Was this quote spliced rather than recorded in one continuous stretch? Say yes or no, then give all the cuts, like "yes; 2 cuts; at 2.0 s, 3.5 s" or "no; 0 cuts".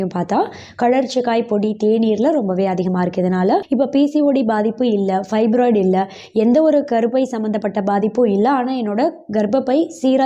yes; 1 cut; at 3.6 s